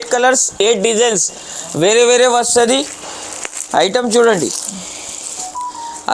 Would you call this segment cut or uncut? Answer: uncut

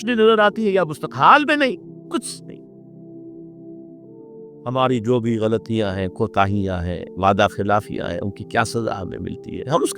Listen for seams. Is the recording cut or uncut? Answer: cut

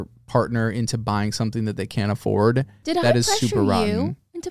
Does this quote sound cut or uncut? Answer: cut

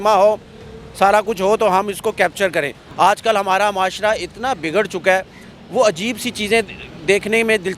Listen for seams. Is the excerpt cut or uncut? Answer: cut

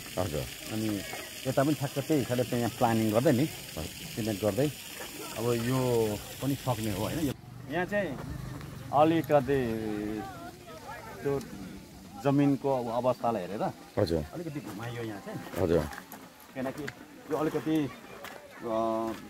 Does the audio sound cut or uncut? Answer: cut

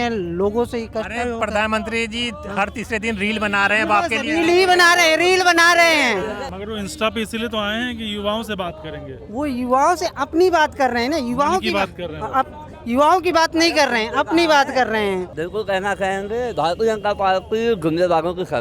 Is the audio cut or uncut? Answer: cut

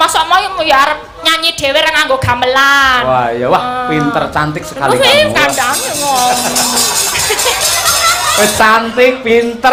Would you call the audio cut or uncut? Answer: uncut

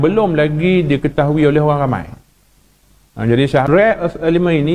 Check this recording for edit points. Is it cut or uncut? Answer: cut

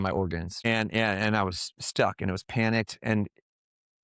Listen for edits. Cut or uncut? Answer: uncut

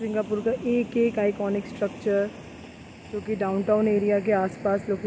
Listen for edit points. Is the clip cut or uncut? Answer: uncut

